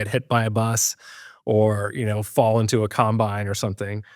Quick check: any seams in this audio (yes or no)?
no